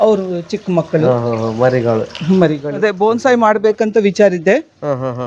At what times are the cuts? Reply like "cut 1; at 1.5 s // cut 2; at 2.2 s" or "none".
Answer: cut 1; at 2.7 s

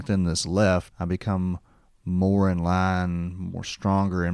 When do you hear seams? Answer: cut 1; at 0.9 s

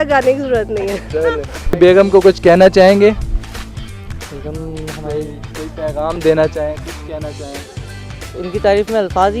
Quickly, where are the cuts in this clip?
cut 1; at 1.8 s

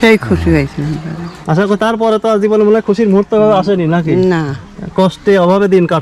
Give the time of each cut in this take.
none

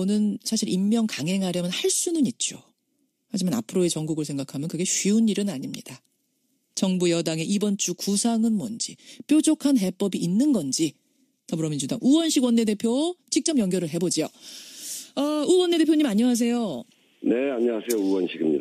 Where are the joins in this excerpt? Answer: cut 1; at 15.7 s

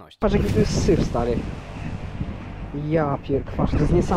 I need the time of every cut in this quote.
none

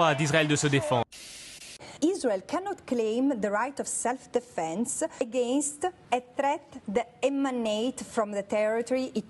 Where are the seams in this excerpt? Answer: cut 1; at 1.6 s

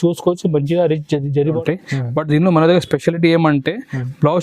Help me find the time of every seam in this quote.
cut 1; at 1.6 s

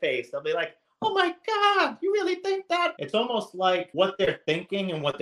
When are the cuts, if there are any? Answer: cut 1; at 2.9 s // cut 2; at 3.9 s

